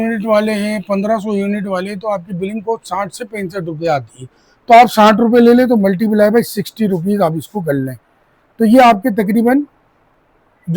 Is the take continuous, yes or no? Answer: yes